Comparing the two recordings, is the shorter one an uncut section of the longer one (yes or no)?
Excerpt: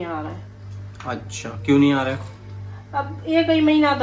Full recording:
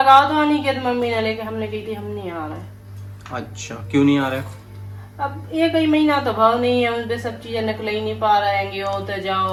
yes